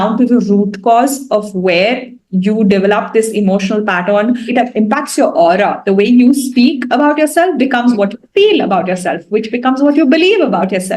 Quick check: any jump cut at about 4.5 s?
yes; 1 cut; at 4.5 s

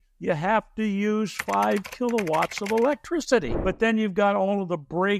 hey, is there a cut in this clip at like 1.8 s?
no; 1 cut; at 3.5 s

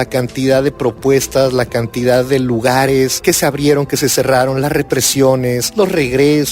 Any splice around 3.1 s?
yes; 2 cuts; at 3.1 s, 5.6 s

